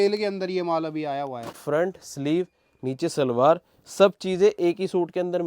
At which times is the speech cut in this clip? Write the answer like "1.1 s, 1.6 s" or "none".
1.6 s

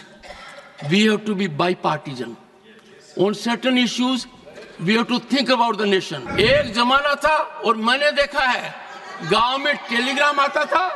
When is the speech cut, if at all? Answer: 6.2 s

